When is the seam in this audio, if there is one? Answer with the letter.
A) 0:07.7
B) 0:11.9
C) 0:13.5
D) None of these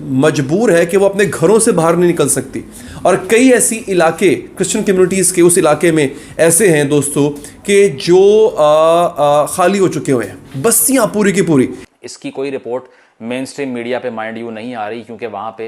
B